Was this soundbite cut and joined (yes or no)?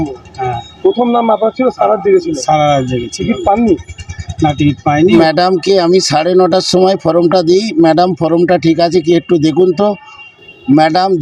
yes